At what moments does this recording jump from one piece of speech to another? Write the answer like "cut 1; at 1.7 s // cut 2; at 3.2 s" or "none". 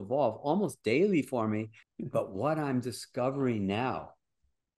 cut 1; at 1.8 s